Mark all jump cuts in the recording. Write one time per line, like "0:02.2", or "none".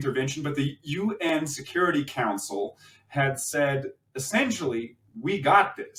none